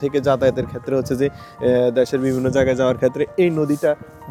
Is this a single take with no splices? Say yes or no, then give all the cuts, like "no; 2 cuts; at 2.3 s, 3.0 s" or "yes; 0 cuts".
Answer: yes; 0 cuts